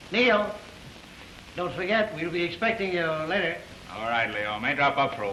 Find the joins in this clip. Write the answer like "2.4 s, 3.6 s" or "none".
none